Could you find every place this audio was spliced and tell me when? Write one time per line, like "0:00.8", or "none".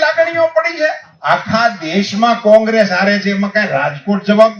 0:01.1